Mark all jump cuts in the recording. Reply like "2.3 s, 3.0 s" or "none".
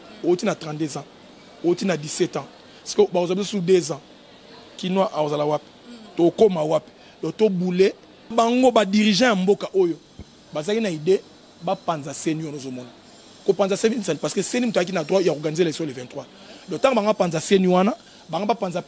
8.3 s